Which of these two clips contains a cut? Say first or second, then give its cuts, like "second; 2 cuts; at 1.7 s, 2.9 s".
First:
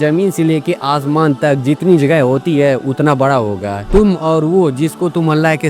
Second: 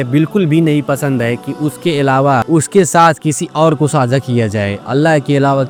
first; 1 cut; at 3.8 s